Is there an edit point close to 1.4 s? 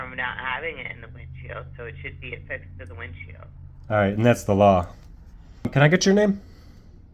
no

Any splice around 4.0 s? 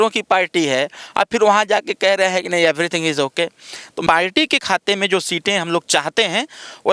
yes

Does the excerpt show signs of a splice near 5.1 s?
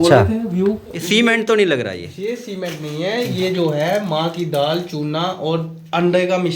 no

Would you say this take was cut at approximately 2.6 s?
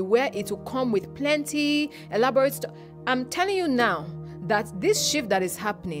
no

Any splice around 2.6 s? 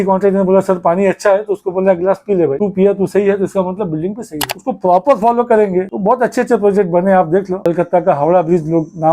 no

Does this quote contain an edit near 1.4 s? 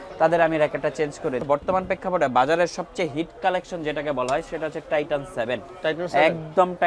yes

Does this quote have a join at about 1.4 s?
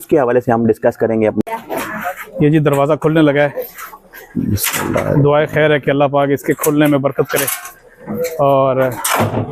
yes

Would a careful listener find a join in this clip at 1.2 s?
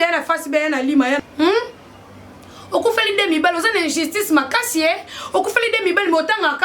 yes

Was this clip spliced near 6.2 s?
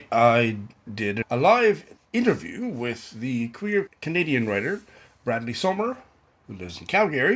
no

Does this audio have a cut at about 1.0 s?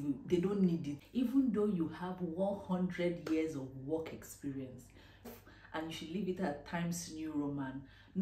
yes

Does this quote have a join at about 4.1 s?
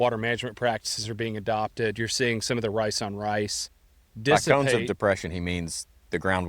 no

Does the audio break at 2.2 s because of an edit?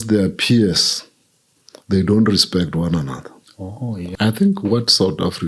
no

